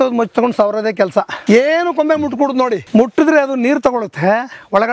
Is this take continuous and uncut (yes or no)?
no